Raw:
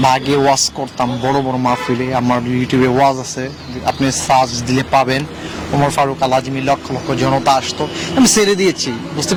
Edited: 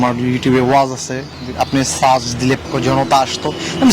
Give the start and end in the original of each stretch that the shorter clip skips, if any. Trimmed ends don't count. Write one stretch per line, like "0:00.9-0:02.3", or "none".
0:04.9-0:06.9